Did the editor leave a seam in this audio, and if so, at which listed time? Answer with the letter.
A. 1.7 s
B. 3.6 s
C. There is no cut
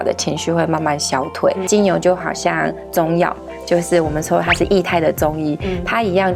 A